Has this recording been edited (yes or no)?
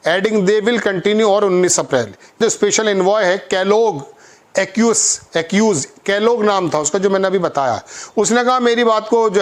yes